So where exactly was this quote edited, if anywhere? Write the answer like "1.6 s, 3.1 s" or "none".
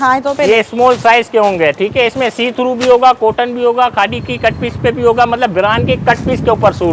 none